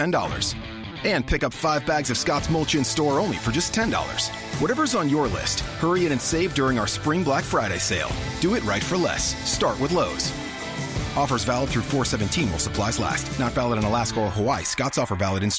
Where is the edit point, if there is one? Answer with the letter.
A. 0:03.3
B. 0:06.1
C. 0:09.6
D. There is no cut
D